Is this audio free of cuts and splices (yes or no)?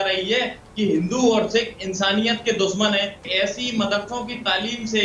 no